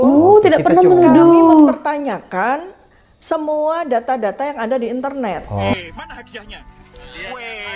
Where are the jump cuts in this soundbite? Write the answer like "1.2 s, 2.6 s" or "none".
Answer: 5.7 s